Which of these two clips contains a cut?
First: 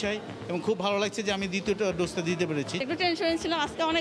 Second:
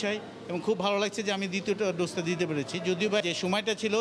first; 1 cut; at 2.7 s

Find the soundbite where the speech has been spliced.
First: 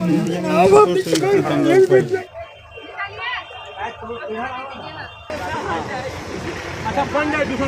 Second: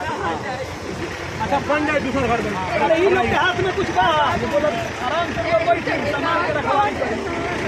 first; 1 cut; at 2.2 s

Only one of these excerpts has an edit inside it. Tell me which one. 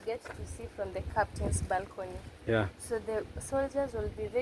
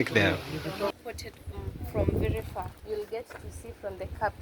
second; 1 cut; at 0.9 s

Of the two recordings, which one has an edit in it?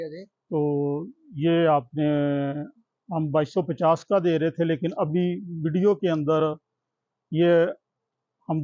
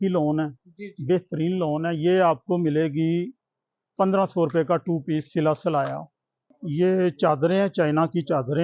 second; 1 cut; at 6.5 s

